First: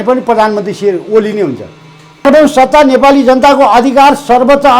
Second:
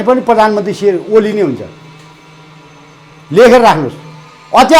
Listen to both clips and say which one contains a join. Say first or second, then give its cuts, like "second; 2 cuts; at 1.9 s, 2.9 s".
first; 1 cut; at 2.2 s